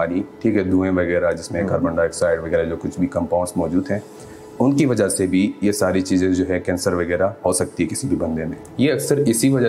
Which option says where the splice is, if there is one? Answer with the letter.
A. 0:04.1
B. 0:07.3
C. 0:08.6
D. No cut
C